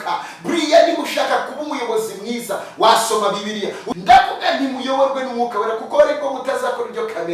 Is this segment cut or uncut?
cut